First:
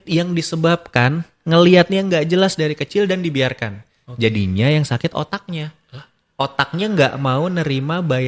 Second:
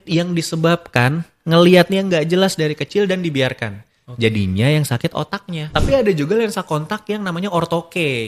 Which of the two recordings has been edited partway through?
second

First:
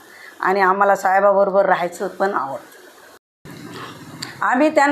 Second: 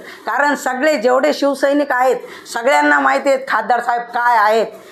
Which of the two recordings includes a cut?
first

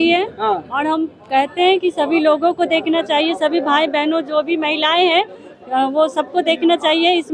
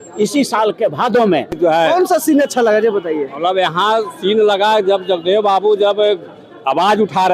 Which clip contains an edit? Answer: second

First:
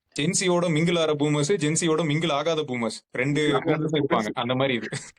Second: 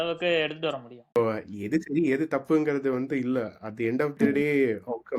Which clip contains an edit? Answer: second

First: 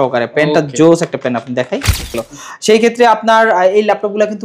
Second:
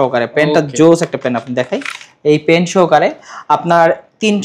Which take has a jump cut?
first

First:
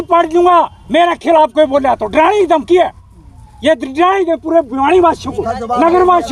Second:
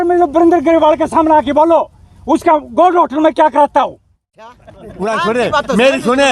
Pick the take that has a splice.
second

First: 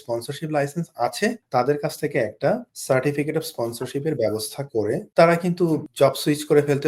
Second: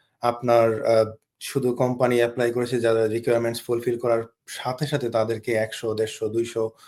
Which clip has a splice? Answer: first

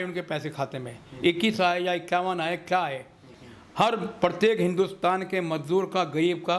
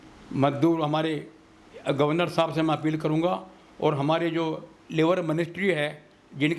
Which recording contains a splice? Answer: first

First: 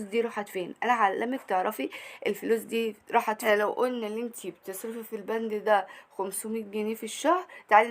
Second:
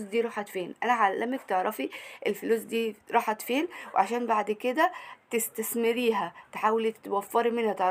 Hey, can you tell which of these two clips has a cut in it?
first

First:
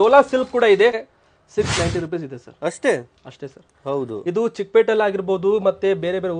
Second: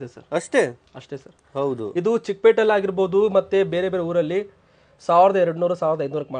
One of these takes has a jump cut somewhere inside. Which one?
first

